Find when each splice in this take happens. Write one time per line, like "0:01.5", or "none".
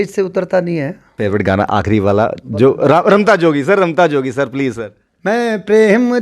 0:01.1